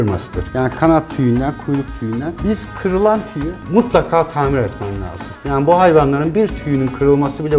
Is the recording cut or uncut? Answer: uncut